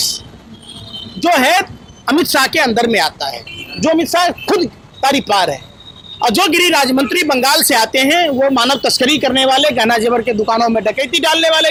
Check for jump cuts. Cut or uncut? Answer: uncut